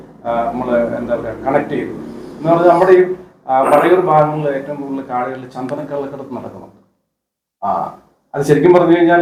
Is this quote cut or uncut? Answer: uncut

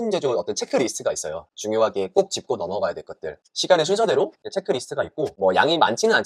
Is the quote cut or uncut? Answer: uncut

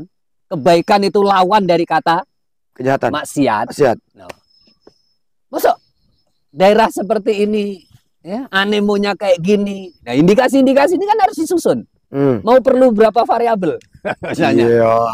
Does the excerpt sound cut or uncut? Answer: uncut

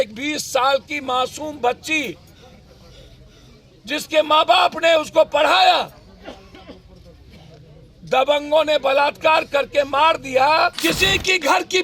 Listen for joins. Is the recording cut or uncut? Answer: cut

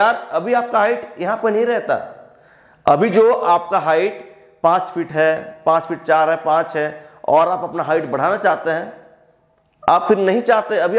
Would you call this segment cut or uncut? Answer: uncut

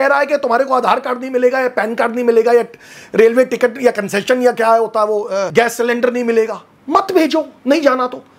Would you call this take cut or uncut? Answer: cut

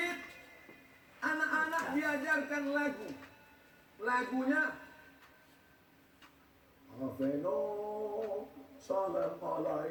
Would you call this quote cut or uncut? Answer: uncut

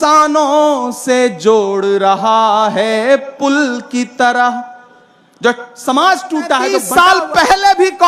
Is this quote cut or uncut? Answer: cut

